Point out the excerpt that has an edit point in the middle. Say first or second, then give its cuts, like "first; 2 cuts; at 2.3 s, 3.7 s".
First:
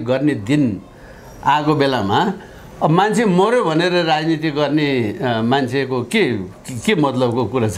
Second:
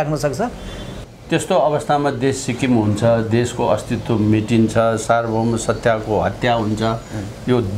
second; 1 cut; at 0.9 s